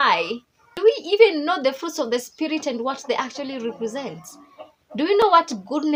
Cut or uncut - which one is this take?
uncut